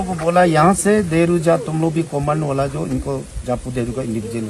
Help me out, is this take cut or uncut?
uncut